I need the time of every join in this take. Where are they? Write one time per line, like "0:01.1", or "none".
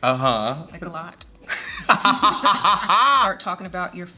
0:03.3